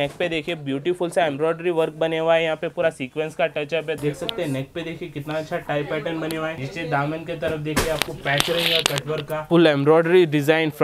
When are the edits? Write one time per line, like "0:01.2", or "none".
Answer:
0:04.0
0:06.6
0:09.4